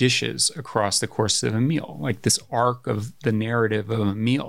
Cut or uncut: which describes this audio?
uncut